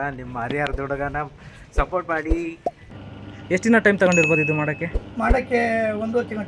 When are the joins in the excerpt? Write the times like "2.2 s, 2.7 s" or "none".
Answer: 2.8 s